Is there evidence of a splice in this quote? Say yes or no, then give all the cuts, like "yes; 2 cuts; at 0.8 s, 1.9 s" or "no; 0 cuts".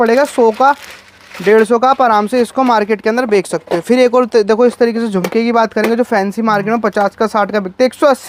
no; 0 cuts